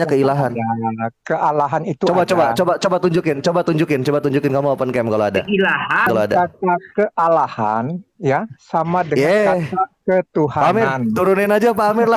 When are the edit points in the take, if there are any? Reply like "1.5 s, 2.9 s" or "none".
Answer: 6.1 s